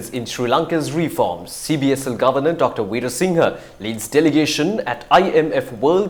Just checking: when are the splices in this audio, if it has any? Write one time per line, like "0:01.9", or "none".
none